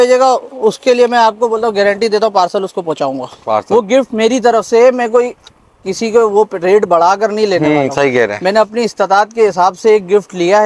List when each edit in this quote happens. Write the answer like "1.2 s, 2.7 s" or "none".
3.7 s